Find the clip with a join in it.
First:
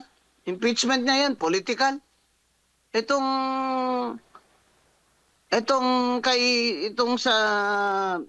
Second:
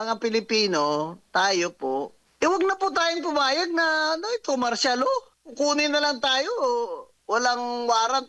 second; 3 cuts; at 2.2 s, 5.4 s, 7.1 s

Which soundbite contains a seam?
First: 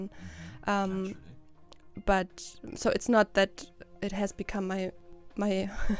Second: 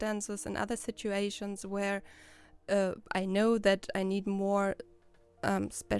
first; 1 cut; at 5.0 s

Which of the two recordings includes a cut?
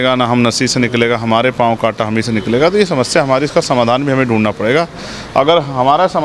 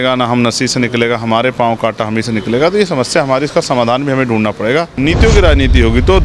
second; 1 cut; at 4.9 s

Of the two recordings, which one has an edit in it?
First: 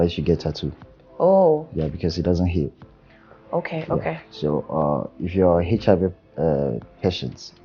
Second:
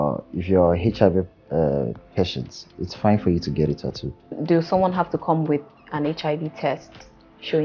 second; 1 cut; at 4.4 s

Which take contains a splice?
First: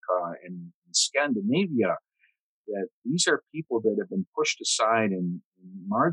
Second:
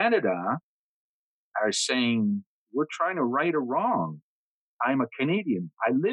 second; 2 cuts; at 2.6 s, 4.5 s

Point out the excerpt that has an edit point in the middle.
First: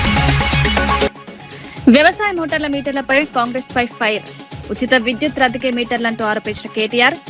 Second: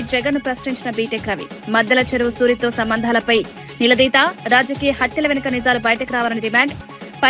first; 1 cut; at 1.1 s

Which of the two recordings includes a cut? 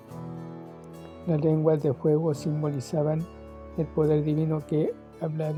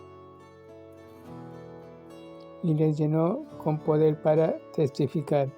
second; 1 cut; at 2.6 s

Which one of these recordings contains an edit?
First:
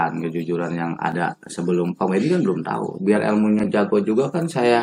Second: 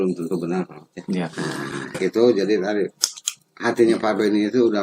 second; 1 cut; at 2.0 s

